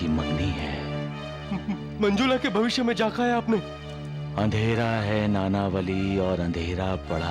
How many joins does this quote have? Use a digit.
0